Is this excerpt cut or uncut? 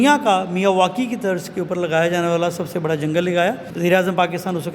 cut